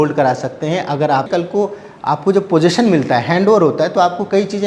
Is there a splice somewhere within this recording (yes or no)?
yes